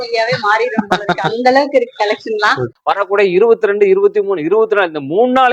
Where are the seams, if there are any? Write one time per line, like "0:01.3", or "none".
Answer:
0:02.8